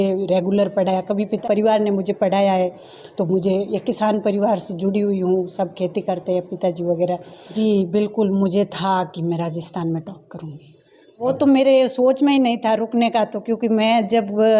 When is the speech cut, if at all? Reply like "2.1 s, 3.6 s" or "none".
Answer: 1.4 s, 7.5 s, 11.2 s